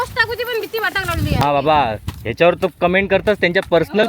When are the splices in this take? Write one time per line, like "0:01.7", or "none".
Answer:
0:01.4